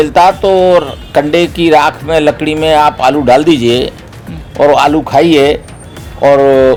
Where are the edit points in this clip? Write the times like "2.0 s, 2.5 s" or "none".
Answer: none